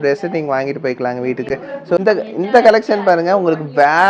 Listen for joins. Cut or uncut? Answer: uncut